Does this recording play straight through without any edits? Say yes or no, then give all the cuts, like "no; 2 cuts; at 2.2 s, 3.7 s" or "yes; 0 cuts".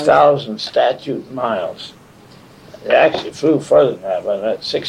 yes; 0 cuts